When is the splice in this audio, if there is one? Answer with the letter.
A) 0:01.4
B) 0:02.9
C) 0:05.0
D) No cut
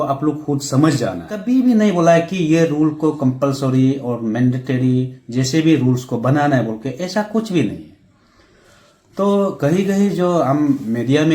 A